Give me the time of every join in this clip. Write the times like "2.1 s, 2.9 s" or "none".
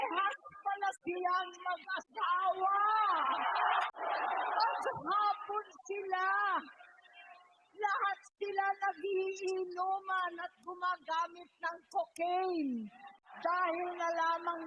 3.9 s, 13.1 s